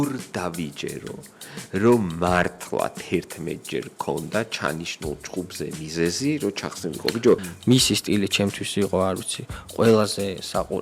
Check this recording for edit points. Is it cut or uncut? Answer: cut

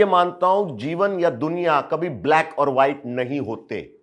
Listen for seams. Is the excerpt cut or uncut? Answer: uncut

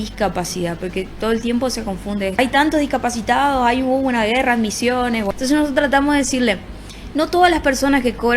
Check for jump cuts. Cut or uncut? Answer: cut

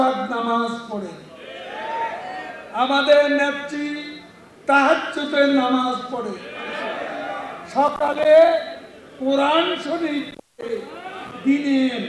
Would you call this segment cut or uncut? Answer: uncut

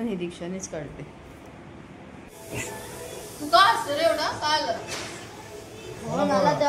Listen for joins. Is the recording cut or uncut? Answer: cut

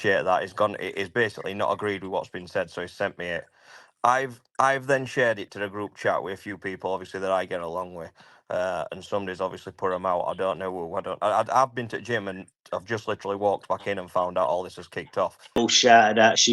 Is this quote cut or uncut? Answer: cut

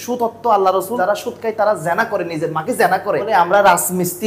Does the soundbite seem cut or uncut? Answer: cut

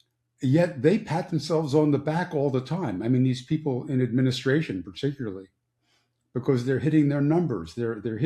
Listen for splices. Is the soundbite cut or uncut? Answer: uncut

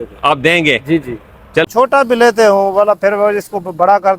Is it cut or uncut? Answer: cut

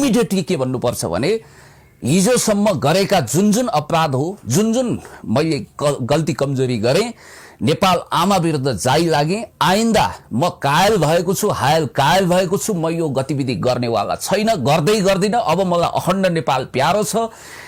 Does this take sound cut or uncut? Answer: uncut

